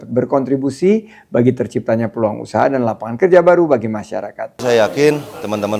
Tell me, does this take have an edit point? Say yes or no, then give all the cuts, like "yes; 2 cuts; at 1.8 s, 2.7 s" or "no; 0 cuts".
yes; 1 cut; at 4.6 s